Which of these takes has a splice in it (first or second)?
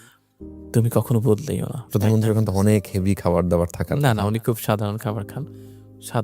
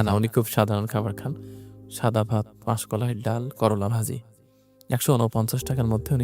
first